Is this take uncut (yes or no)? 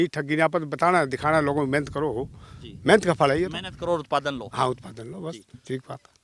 yes